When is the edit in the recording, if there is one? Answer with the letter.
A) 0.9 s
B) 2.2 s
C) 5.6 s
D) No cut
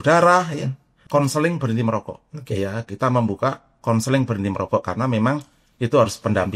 A